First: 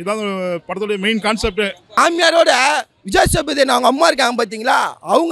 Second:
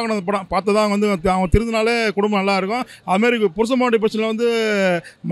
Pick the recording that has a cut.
first; 1 cut; at 2.0 s

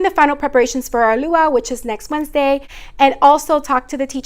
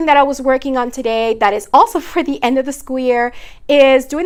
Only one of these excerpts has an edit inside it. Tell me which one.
first; 1 cut; at 2.7 s

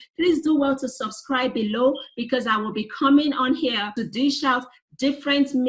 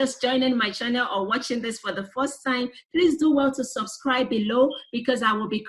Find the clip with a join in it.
first; 1 cut; at 4.0 s

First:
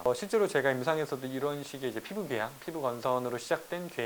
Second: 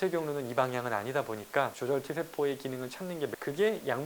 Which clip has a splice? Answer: second; 2 cuts; at 1.7 s, 3.3 s

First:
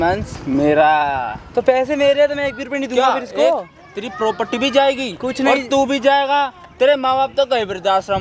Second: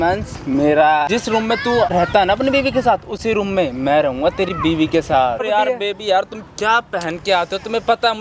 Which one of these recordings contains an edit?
second; 2 cuts; at 1.6 s, 5.4 s

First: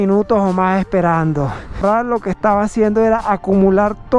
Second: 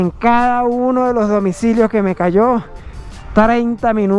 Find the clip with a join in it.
first; 1 cut; at 1.8 s

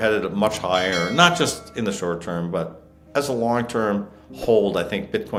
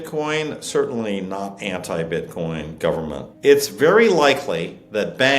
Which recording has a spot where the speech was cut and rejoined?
second; 1 cut; at 3.2 s

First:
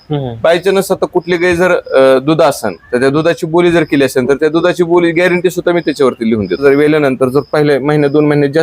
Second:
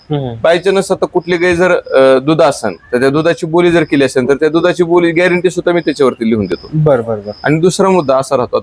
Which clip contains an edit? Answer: first; 1 cut; at 6.5 s

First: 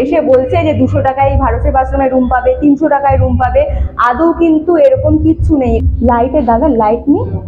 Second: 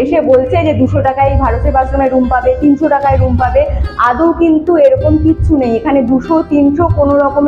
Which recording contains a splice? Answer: first; 1 cut; at 5.8 s

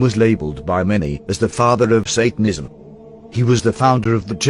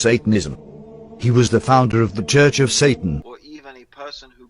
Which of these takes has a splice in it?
second; 1 cut; at 3.3 s

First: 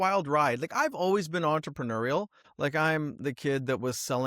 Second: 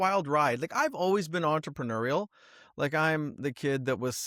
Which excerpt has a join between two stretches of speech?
first; 1 cut; at 2.4 s

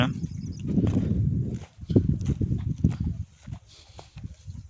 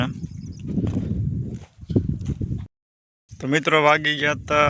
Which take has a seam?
second; 1 cut; at 2.7 s

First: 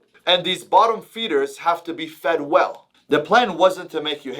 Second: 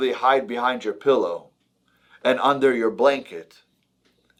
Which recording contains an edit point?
first; 1 cut; at 2.9 s

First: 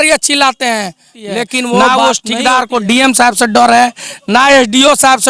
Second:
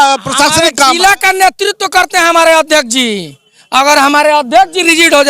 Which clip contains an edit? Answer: first; 1 cut; at 1.9 s

